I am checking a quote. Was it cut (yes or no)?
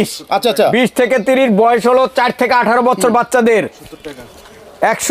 no